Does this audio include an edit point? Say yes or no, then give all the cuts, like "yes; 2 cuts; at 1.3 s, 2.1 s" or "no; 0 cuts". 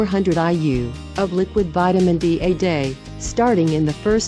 yes; 1 cut; at 0.9 s